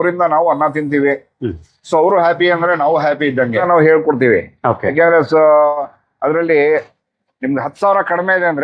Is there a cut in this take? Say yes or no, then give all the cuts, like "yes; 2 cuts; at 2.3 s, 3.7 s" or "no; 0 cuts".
yes; 1 cut; at 3.6 s